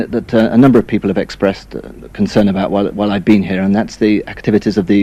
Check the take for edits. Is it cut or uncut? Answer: uncut